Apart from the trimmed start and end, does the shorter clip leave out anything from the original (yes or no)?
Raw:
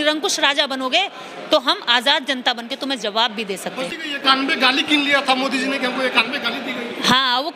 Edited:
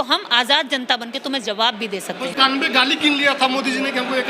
yes